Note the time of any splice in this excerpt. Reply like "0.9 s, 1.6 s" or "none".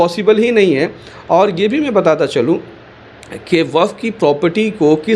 none